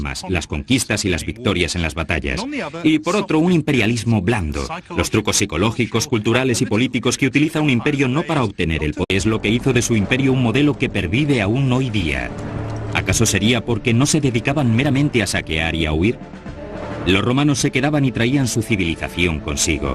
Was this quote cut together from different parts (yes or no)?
no